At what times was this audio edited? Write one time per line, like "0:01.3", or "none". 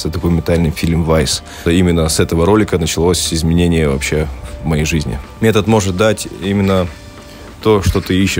0:01.6
0:05.2